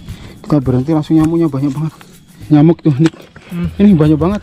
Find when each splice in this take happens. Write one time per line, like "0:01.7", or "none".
0:02.4